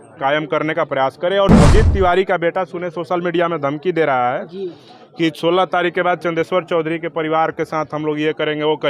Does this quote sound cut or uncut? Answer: cut